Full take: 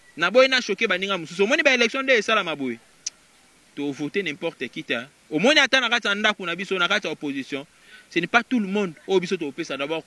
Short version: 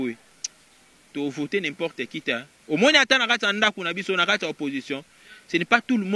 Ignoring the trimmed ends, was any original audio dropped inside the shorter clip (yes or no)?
no